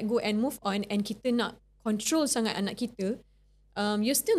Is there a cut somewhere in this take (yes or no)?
no